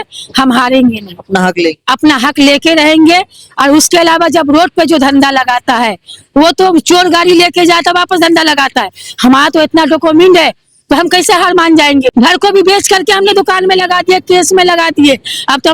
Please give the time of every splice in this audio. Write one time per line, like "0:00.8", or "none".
0:12.1

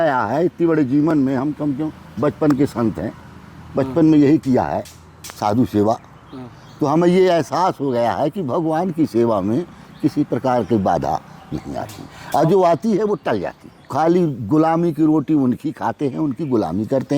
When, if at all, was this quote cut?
0:13.9

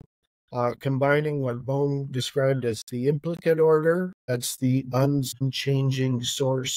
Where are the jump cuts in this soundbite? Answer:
0:04.2
0:05.5

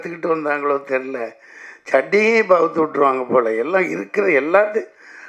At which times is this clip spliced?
none

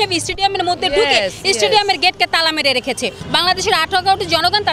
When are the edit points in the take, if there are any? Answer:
0:03.2

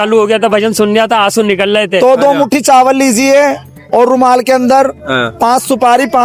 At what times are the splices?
0:02.0

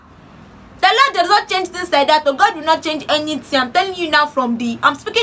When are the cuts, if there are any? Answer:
none

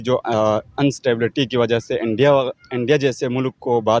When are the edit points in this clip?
none

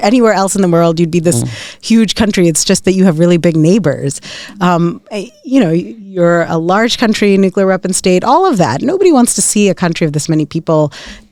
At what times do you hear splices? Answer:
none

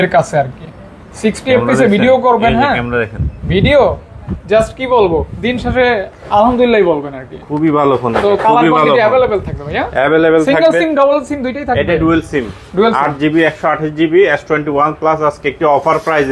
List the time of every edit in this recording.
none

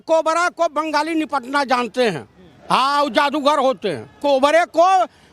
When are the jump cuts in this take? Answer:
0:04.2

